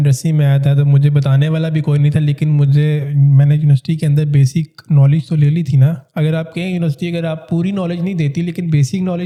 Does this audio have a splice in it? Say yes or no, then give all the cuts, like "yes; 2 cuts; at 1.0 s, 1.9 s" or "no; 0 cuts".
no; 0 cuts